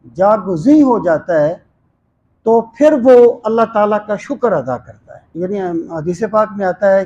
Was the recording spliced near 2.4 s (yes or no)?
no